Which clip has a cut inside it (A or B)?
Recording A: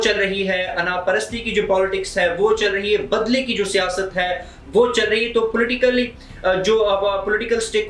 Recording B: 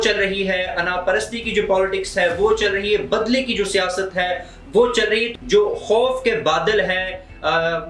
B